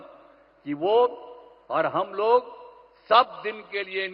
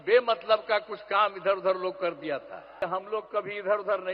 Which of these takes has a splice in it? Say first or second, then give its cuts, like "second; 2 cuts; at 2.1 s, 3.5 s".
second; 1 cut; at 2.8 s